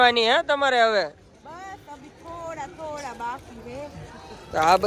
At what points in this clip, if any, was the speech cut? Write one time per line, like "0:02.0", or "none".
none